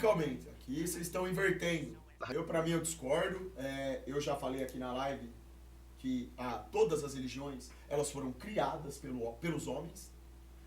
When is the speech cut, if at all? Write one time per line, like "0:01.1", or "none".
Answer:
0:02.3